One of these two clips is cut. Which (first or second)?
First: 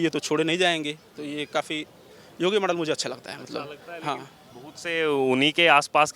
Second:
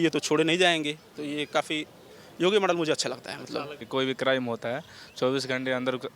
second